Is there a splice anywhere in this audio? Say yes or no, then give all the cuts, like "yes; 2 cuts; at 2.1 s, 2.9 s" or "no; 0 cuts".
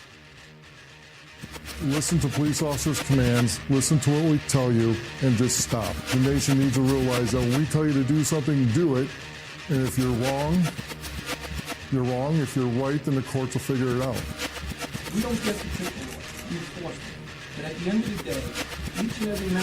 yes; 1 cut; at 1.3 s